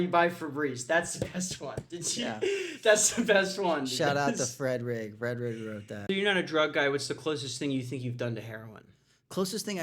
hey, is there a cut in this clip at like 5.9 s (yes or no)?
yes